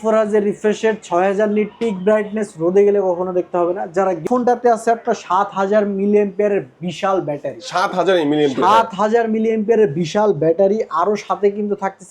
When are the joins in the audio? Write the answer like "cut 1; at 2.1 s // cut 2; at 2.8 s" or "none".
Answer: cut 1; at 4.2 s